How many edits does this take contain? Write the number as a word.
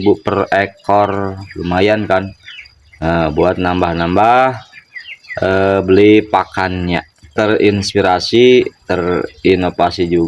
one